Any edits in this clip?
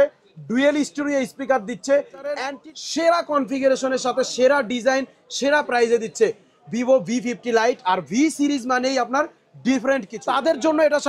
yes; 2 cuts; at 2.5 s, 10.1 s

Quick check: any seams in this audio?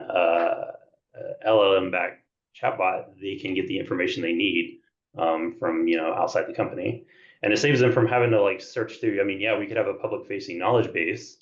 no; 0 cuts

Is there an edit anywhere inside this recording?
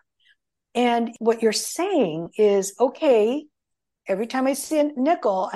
yes; 1 cut; at 1.1 s

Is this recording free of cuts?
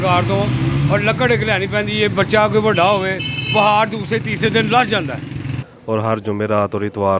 no; 1 cut; at 5.5 s

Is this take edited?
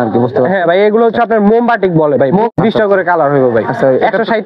yes; 1 cut; at 2.5 s

